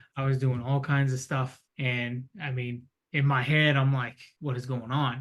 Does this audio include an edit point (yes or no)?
yes